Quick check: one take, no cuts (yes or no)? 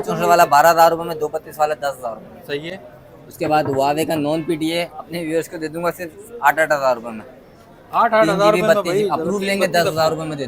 yes